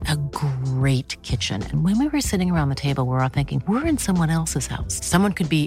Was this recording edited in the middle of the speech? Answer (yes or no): no